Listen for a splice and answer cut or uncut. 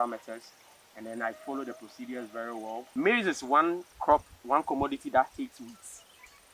cut